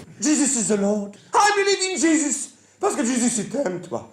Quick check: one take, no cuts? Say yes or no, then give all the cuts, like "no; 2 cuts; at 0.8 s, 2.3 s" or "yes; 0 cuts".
no; 1 cut; at 1.2 s